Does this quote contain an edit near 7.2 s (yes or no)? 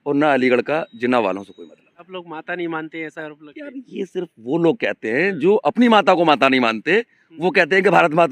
no